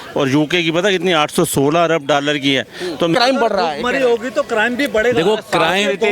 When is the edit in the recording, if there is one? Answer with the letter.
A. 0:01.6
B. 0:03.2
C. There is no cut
B